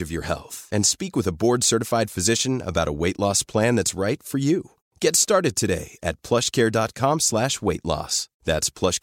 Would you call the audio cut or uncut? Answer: uncut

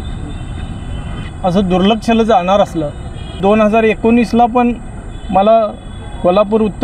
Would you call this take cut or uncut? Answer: cut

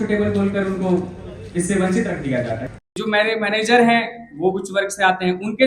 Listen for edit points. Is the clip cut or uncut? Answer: cut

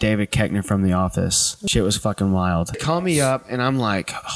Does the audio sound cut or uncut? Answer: cut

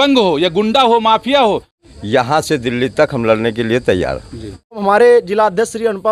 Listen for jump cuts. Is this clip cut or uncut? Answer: cut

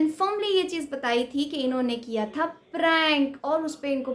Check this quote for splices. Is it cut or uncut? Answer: uncut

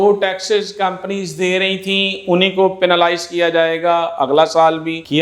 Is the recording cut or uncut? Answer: uncut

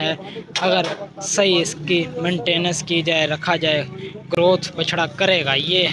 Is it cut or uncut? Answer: uncut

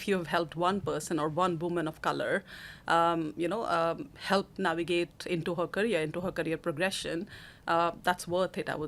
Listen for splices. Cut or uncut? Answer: uncut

